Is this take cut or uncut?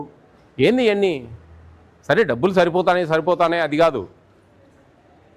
uncut